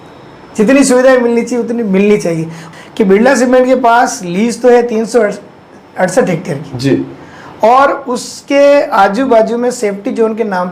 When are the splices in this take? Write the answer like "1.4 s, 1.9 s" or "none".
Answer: 2.6 s